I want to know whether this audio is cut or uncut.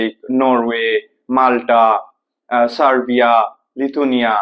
uncut